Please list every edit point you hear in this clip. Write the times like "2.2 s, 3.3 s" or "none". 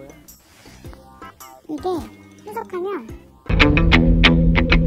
none